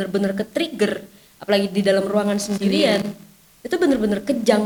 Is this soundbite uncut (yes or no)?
yes